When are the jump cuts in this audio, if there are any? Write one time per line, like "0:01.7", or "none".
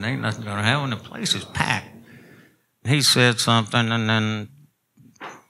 0:02.8